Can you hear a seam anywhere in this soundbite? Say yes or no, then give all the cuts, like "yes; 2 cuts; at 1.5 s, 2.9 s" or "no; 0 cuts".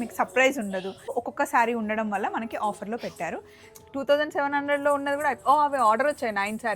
yes; 2 cuts; at 1.1 s, 3.6 s